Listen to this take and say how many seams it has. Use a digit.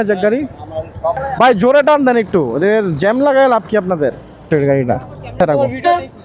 2